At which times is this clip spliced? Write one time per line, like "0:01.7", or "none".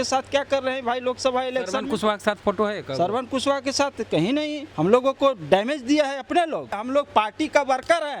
0:04.6
0:06.7